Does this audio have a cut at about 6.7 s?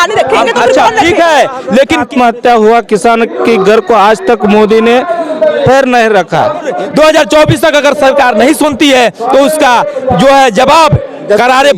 yes; 2 cuts; at 2.0 s, 6.7 s

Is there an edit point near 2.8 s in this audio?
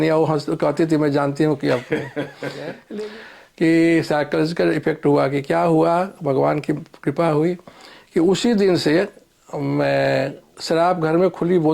yes; 1 cut; at 2.8 s

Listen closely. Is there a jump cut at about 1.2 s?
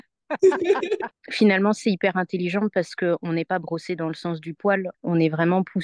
yes; 1 cut; at 1.2 s

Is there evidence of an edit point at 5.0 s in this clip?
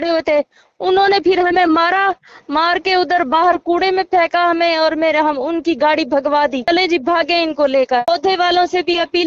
no; 2 cuts; at 6.7 s, 8.1 s

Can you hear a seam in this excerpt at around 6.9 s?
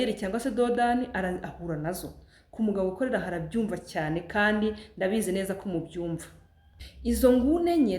yes; 1 cut; at 6.9 s

